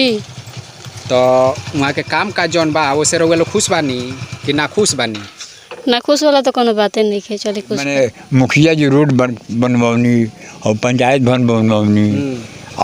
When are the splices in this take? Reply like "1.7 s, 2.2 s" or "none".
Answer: 7.9 s